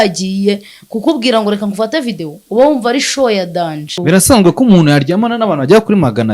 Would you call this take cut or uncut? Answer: cut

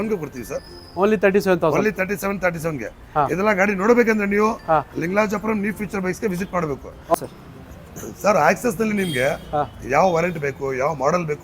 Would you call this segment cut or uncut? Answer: cut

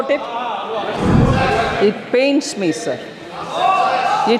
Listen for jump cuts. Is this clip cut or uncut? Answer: cut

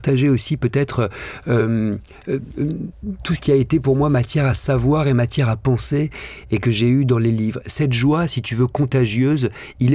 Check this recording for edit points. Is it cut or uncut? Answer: uncut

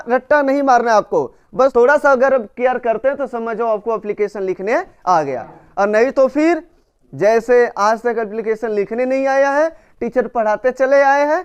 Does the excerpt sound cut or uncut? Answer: uncut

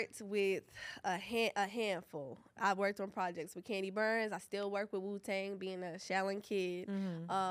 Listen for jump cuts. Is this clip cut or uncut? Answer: uncut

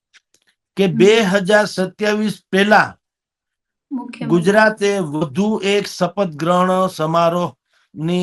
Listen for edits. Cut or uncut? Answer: uncut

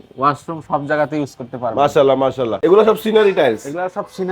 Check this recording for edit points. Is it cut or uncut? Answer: cut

